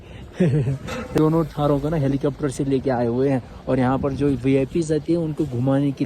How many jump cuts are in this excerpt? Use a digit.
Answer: 1